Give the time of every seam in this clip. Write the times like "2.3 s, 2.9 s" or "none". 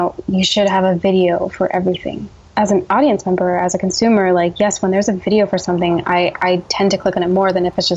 2.4 s